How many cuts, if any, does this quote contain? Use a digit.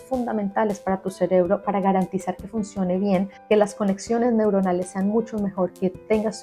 1